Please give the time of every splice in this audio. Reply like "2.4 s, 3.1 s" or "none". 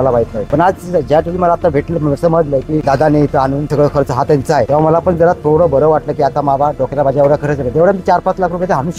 none

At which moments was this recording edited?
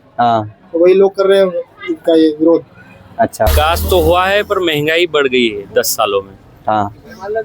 3.5 s

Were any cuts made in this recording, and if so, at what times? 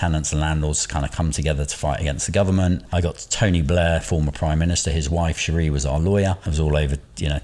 2.9 s, 6.4 s

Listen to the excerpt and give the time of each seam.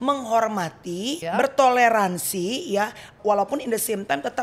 1.2 s, 3.2 s

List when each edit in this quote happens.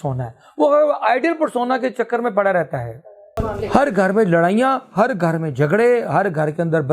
3.3 s

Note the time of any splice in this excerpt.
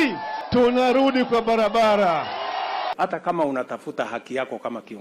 2.9 s

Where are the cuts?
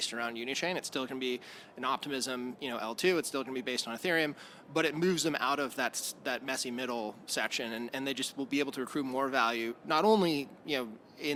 none

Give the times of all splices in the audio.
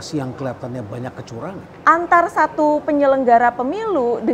1.7 s

